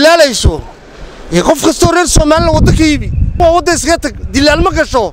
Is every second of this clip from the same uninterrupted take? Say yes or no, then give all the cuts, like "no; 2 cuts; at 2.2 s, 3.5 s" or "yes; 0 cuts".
no; 1 cut; at 3.4 s